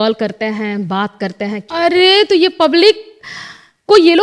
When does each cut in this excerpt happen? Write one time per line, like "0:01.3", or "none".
0:01.6